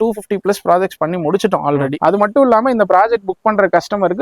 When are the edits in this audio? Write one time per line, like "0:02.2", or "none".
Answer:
0:02.0